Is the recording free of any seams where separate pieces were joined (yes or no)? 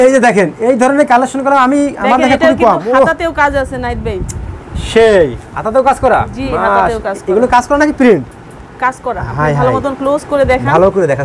yes